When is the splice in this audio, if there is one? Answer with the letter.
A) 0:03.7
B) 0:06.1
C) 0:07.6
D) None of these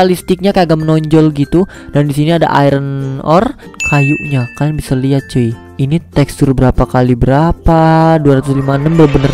A